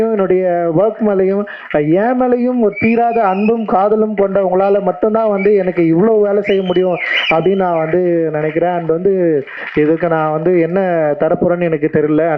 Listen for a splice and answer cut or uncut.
uncut